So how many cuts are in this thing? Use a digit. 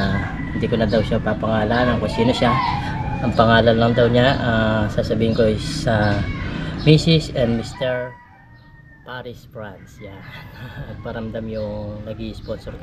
1